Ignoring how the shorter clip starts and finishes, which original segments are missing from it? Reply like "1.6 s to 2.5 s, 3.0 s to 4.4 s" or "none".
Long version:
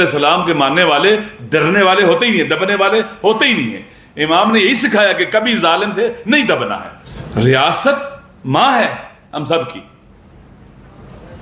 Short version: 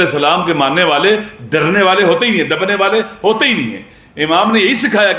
none

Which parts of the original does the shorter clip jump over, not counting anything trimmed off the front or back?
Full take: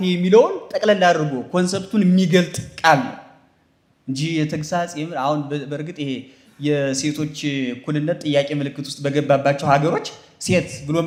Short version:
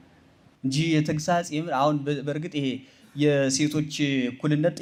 none

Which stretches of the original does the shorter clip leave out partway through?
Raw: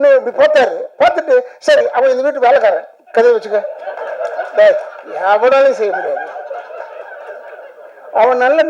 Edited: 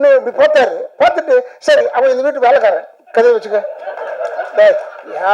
none

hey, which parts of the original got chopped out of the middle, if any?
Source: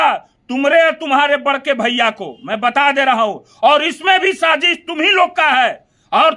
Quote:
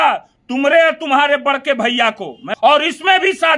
2.4 s to 3.4 s

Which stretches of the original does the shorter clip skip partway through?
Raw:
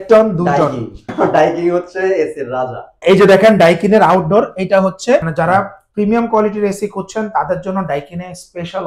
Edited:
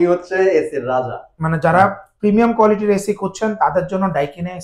3.1 s to 5.2 s

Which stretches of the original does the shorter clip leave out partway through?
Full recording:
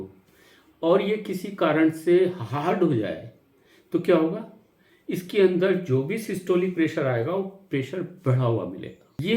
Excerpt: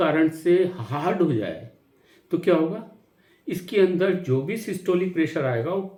none

